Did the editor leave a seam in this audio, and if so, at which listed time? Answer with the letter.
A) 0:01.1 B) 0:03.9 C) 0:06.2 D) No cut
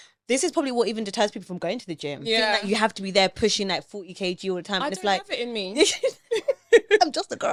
D